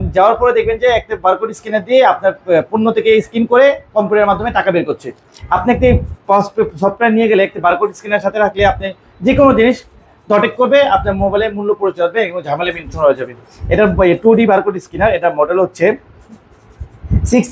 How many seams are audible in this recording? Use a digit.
0